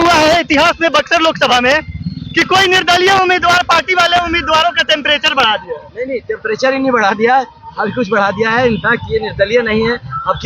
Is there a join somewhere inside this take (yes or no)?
no